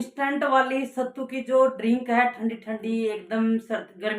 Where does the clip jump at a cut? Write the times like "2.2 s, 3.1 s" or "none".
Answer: none